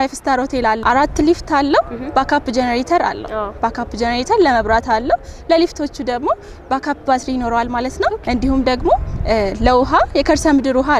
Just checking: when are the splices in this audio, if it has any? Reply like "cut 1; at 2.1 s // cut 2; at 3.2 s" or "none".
cut 1; at 0.8 s // cut 2; at 8.2 s